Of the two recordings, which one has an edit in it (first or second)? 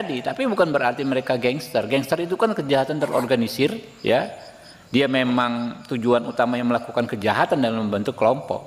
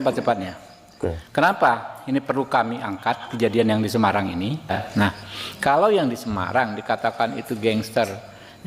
second